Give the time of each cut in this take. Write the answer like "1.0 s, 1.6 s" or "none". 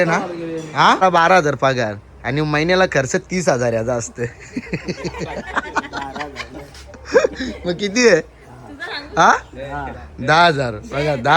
1.0 s